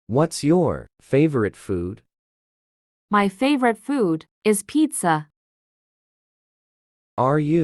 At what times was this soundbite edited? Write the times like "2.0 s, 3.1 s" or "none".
0.9 s